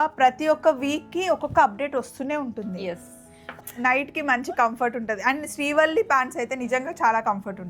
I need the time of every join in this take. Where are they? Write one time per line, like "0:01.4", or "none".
0:03.6